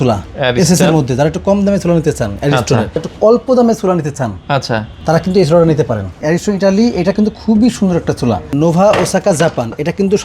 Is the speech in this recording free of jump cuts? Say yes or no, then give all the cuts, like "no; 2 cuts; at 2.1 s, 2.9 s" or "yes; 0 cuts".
no; 4 cuts; at 3.1 s, 4.9 s, 6.2 s, 8.5 s